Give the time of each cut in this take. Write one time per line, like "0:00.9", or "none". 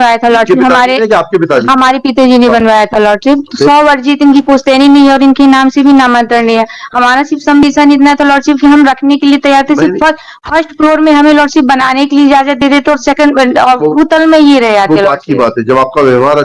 none